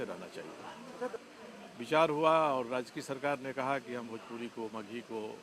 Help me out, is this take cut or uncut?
cut